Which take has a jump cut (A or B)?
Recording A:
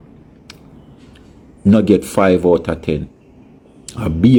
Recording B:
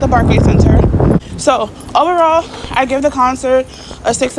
B